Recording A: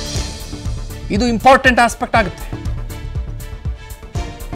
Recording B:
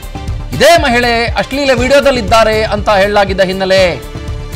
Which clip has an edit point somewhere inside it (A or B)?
A